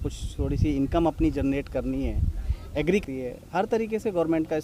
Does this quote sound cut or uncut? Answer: cut